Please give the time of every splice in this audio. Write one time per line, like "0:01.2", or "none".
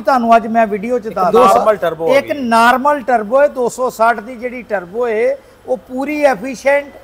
0:01.3